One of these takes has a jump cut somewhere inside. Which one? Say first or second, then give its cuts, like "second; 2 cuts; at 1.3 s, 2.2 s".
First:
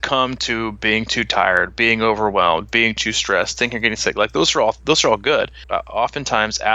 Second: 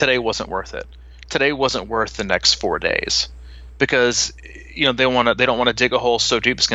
first; 1 cut; at 5.6 s